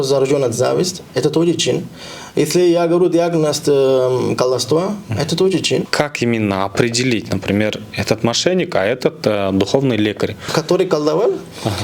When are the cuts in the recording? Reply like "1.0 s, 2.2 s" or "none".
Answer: 5.9 s, 10.4 s